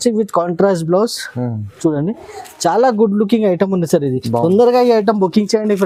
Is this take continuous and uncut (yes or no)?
yes